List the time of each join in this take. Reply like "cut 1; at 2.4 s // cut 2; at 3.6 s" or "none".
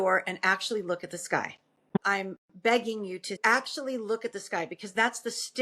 cut 1; at 1.9 s // cut 2; at 3.4 s